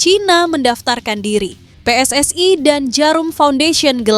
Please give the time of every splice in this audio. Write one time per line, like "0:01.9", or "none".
0:01.7